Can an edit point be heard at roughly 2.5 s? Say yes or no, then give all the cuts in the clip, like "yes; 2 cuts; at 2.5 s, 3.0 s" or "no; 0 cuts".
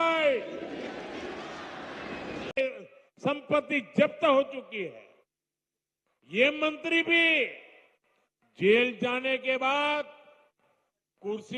yes; 1 cut; at 2.5 s